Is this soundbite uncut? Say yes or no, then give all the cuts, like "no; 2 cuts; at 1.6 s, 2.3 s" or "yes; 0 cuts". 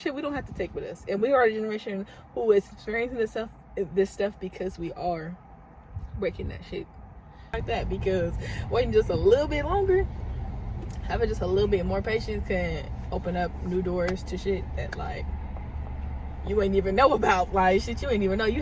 no; 1 cut; at 7.5 s